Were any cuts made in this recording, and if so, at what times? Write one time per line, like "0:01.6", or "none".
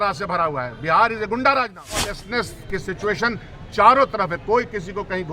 0:02.2